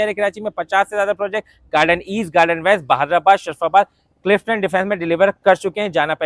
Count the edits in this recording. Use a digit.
0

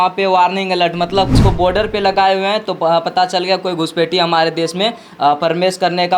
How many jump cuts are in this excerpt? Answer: 1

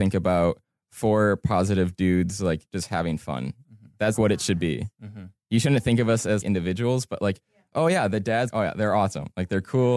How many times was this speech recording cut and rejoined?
3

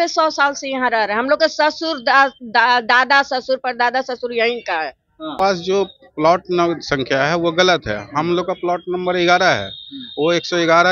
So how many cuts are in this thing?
1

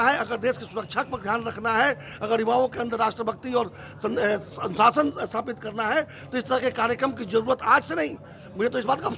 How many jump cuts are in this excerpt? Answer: 0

